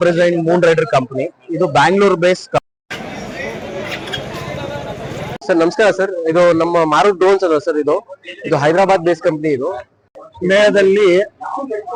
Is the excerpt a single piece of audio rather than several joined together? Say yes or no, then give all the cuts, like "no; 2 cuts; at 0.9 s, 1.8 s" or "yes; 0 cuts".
yes; 0 cuts